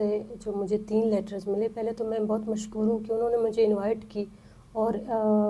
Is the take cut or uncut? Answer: uncut